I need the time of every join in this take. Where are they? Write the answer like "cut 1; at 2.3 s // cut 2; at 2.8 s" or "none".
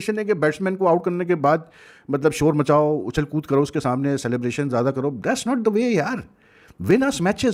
none